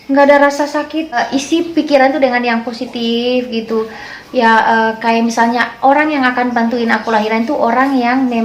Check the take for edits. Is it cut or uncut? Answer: cut